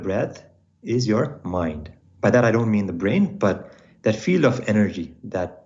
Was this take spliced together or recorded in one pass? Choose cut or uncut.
uncut